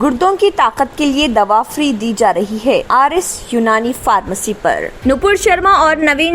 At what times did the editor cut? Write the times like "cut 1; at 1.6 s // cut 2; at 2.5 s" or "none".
cut 1; at 4.9 s